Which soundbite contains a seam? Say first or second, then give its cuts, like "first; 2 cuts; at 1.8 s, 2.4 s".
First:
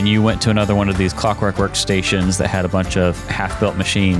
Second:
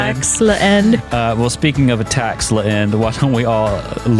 second; 1 cut; at 1.1 s